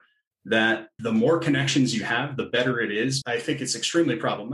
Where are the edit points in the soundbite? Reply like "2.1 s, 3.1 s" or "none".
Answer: 0.9 s, 3.2 s